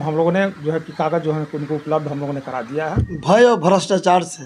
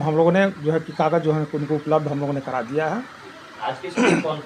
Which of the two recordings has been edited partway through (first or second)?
first